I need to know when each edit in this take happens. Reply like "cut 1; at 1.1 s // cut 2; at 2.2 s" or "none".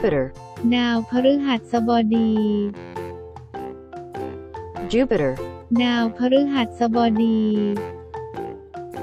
cut 1; at 2.7 s // cut 2; at 4.9 s // cut 3; at 7.8 s